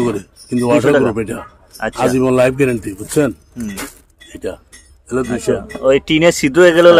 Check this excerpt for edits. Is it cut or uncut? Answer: uncut